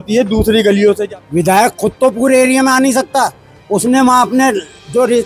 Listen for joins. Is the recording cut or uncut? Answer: cut